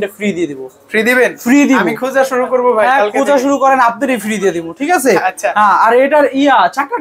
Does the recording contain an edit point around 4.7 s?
no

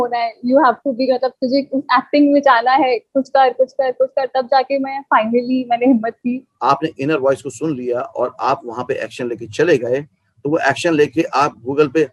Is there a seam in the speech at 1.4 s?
no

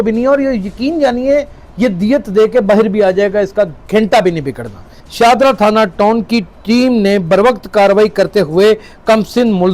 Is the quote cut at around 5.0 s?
yes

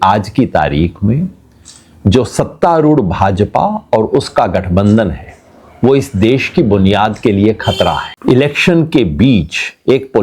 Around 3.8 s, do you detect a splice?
no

